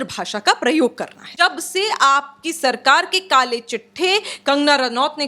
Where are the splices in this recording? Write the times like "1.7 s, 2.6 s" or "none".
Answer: 1.2 s

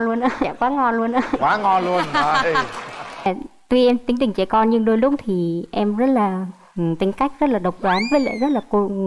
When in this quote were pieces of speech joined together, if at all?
3.3 s

